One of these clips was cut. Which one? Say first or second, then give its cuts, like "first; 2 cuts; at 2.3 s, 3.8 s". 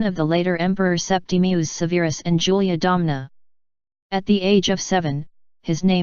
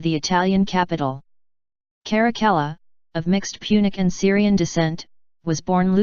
first; 1 cut; at 4.8 s